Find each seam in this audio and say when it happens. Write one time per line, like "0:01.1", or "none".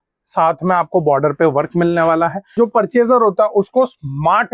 0:02.5

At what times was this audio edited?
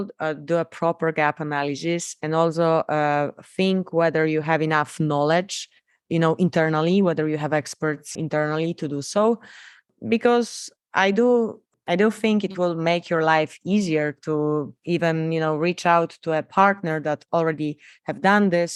none

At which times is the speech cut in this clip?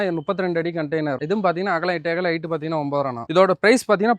0:03.2

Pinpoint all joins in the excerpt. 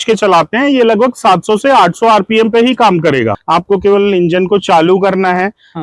0:03.4

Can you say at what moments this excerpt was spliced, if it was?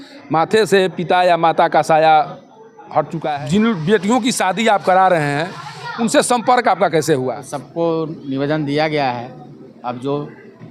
0:03.2
0:07.5

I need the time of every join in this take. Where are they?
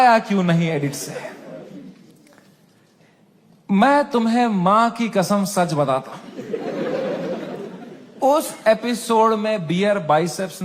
none

